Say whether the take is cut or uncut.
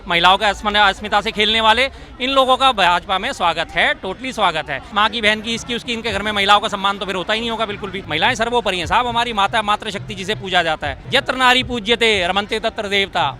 cut